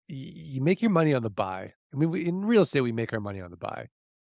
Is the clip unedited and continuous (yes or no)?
yes